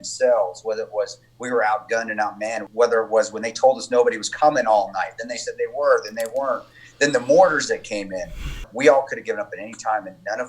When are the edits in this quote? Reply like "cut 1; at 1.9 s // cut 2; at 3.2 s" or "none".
cut 1; at 2.6 s // cut 2; at 8.7 s